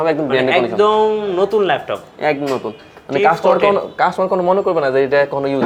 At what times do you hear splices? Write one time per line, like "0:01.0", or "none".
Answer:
none